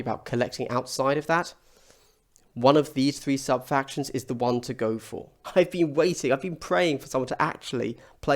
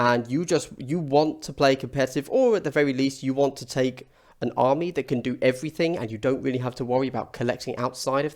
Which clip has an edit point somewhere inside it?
first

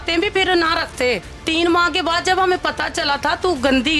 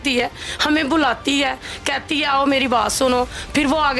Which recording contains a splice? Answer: first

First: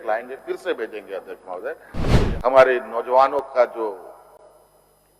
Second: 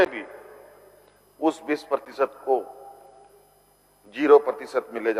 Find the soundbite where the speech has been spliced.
first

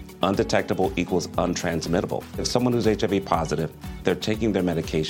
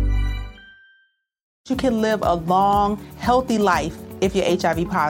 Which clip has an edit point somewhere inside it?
second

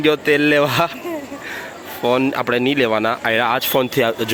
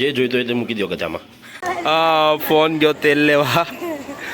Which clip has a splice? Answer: second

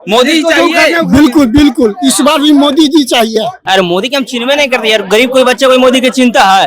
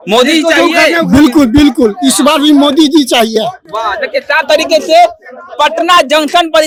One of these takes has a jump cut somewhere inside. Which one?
first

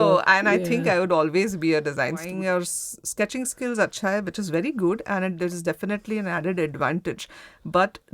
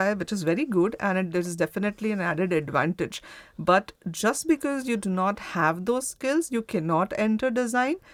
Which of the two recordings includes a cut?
first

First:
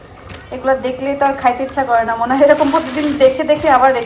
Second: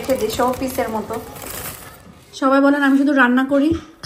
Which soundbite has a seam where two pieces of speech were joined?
second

